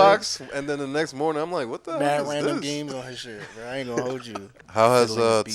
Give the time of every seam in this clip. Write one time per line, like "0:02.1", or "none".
0:04.5